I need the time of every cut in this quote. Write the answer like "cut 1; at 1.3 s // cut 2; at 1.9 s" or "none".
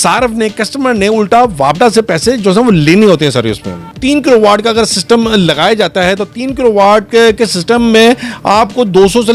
cut 1; at 3.8 s